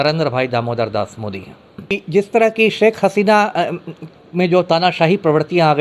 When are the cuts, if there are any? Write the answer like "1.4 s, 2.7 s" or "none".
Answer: 1.9 s